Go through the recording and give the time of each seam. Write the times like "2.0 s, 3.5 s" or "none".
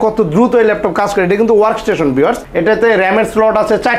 2.5 s